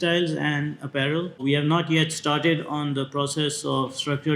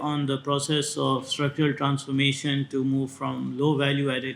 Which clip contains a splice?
first; 1 cut; at 1.4 s

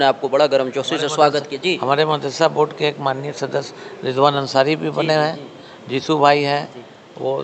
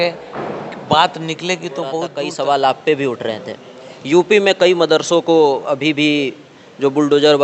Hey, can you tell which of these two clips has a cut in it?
second; 1 cut; at 2.2 s

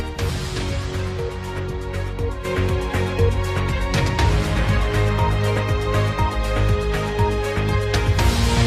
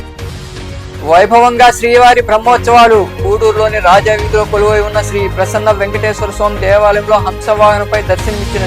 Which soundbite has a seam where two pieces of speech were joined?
second; 1 cut; at 1.0 s

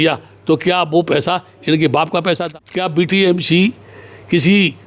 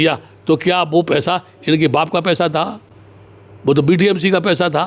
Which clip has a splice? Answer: first; 1 cut; at 2.5 s

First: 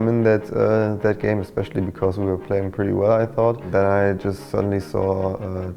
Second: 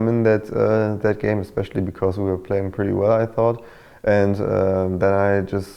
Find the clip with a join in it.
first; 1 cut; at 3.7 s

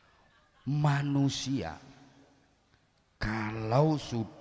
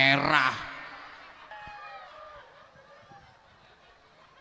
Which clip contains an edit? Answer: second; 1 cut; at 1.5 s

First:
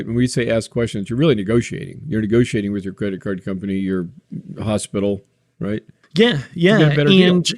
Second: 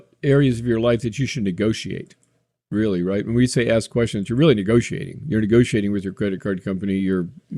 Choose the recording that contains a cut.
first; 1 cut; at 6.0 s

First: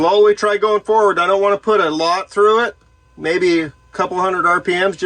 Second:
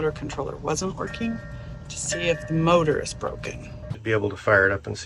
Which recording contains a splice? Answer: second; 1 cut; at 3.9 s

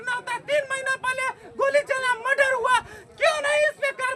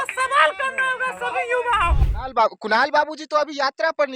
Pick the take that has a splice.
second; 1 cut; at 2.0 s

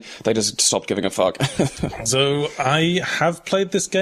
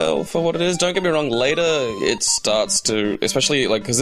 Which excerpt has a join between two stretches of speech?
second; 1 cut; at 1.5 s

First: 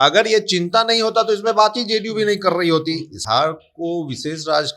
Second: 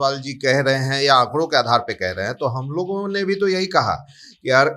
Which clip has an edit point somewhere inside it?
first; 1 cut; at 3.2 s

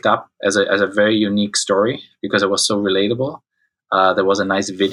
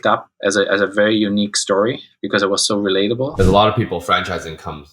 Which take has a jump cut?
second; 1 cut; at 3.3 s

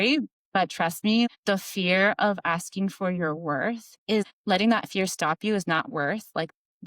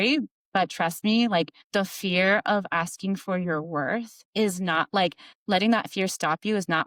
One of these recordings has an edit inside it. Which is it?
first; 2 cuts; at 1.3 s, 4.3 s

